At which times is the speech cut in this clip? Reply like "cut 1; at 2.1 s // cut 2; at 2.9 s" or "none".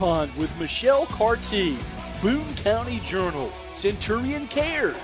none